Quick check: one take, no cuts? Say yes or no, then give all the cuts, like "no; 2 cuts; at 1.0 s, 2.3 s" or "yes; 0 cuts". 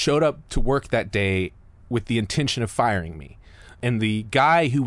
no; 1 cut; at 3.8 s